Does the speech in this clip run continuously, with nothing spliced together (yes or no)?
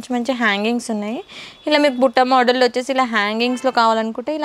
yes